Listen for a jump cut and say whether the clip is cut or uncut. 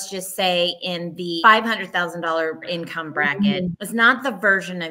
cut